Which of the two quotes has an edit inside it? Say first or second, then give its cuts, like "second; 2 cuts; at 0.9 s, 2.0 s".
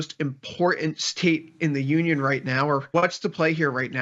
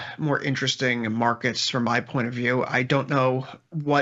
first; 1 cut; at 2.9 s